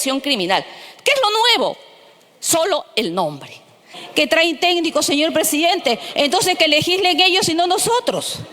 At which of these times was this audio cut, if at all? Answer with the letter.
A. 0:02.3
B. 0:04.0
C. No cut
B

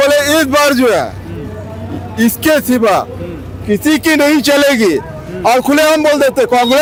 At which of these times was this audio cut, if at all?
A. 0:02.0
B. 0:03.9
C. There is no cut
C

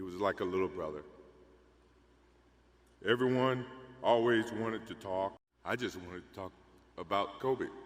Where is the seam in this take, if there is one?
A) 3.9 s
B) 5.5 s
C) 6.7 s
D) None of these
B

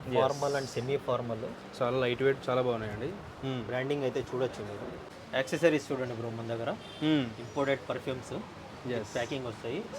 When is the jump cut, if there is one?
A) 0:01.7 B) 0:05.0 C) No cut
B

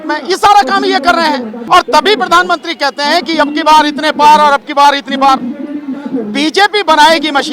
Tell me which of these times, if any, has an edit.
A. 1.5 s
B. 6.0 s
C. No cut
A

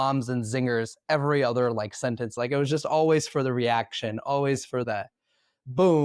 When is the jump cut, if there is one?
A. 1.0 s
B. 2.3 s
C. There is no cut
B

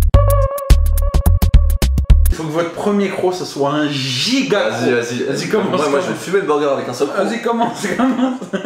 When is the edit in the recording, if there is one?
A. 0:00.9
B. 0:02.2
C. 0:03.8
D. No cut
B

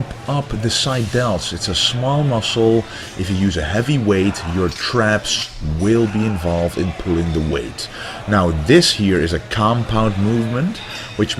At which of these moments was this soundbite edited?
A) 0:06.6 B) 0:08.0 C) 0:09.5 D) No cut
C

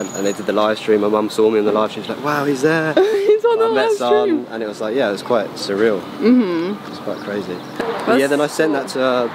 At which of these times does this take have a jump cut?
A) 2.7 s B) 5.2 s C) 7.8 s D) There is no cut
C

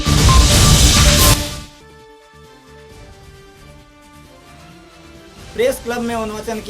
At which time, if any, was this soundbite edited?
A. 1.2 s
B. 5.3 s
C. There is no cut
B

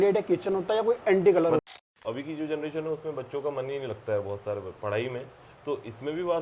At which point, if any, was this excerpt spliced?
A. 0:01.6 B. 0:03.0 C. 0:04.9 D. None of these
A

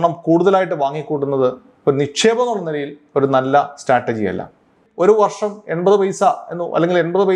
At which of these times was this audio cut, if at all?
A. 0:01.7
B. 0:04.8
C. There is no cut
B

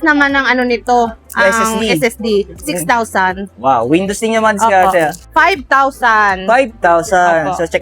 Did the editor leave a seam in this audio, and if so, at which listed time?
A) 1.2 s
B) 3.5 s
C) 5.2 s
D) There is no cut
C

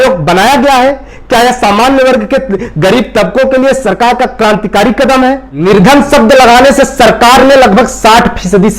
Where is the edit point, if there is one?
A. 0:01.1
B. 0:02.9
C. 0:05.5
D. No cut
C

